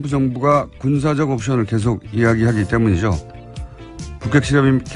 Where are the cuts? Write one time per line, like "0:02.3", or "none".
0:03.9